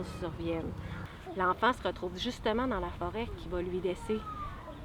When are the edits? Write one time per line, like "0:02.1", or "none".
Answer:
none